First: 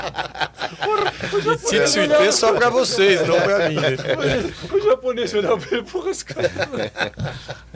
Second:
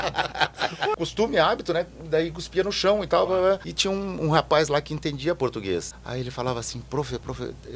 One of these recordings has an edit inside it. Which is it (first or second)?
second